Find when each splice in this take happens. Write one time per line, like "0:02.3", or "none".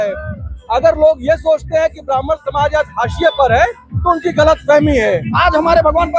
0:05.3